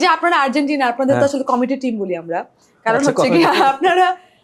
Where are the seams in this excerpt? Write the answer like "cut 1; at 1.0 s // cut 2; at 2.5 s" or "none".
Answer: none